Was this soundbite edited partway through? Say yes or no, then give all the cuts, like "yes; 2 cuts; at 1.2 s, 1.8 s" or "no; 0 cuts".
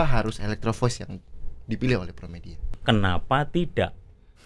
yes; 1 cut; at 2.7 s